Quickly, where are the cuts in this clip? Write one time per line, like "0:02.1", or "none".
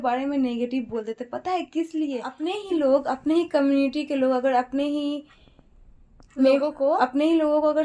0:02.4